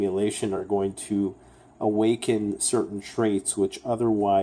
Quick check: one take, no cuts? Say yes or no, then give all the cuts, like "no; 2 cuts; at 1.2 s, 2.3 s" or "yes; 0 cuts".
yes; 0 cuts